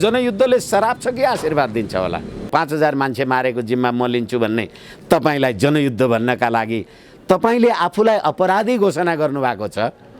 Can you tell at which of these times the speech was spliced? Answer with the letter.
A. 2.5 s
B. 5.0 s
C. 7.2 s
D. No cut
A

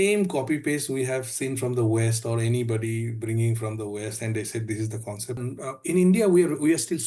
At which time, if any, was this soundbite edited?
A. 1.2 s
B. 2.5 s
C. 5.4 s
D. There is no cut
C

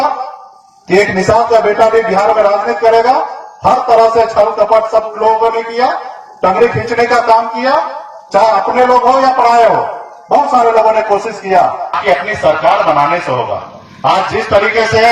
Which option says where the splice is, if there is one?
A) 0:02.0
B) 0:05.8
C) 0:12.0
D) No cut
C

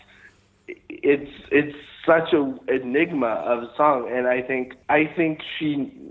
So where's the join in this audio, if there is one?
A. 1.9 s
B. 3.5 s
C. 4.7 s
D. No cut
C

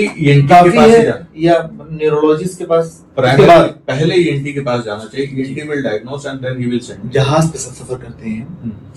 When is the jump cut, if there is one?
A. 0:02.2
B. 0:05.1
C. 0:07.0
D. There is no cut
C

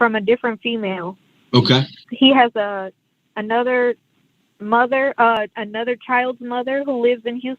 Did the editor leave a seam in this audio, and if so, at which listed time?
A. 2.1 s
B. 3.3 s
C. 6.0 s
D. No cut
A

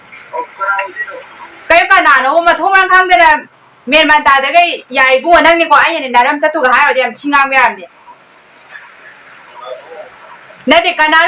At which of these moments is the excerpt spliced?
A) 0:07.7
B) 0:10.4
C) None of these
C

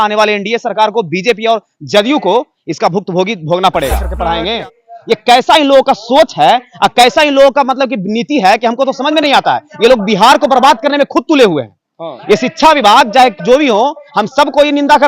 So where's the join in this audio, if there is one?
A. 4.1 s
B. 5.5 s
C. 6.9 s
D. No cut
A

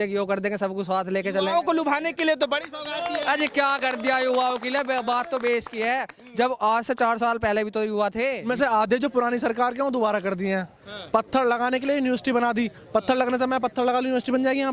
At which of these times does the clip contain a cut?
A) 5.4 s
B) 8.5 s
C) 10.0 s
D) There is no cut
B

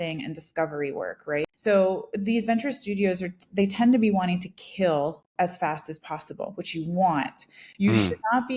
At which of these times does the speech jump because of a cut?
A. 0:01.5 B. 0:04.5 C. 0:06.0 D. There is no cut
A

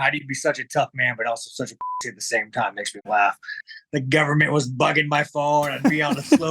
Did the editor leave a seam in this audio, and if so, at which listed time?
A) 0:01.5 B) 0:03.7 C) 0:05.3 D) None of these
B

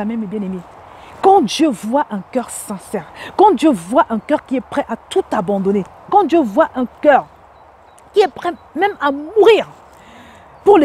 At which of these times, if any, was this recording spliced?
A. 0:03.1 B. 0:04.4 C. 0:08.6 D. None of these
D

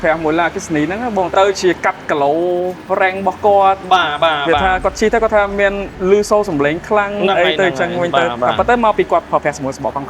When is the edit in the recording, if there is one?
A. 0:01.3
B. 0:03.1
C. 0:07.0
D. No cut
A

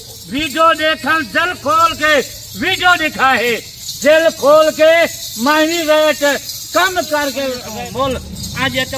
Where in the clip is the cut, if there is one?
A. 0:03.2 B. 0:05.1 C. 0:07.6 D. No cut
C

